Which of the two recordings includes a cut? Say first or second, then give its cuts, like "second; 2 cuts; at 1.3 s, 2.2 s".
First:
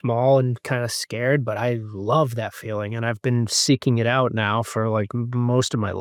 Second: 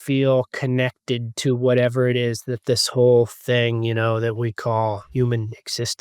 second; 1 cut; at 5.1 s